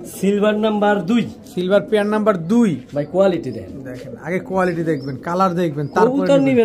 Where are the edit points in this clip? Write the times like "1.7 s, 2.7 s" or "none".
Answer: none